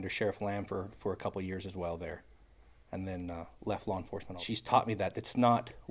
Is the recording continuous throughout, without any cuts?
no; 1 cut; at 4.3 s

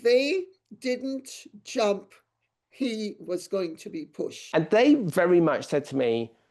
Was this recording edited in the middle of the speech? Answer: yes; 1 cut; at 4.4 s

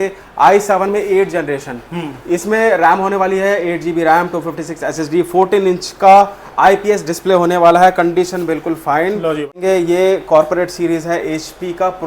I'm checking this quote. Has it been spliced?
yes; 1 cut; at 9.5 s

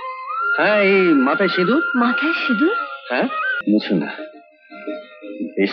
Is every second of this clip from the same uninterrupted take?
no; 1 cut; at 3.5 s

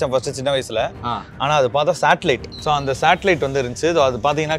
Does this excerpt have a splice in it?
yes; 1 cut; at 2.5 s

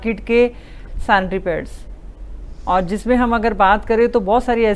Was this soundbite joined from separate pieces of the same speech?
no; 0 cuts

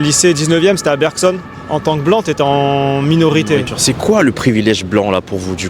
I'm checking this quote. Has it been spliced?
yes; 2 cuts; at 1.5 s, 3.7 s

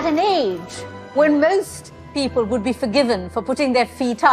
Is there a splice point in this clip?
no; 0 cuts

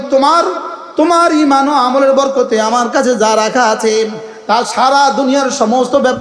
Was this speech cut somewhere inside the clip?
no; 0 cuts

